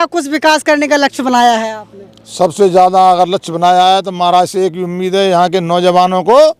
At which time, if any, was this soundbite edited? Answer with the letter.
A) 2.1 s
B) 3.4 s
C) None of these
C